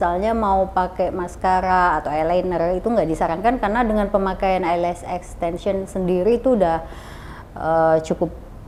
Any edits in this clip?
no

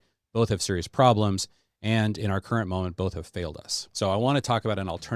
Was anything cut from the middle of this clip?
no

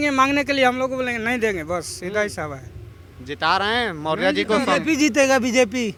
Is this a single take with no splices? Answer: yes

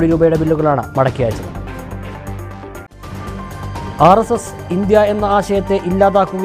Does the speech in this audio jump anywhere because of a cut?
no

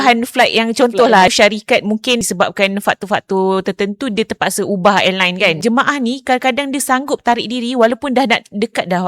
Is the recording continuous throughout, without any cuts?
no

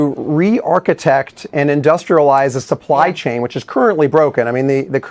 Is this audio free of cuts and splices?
yes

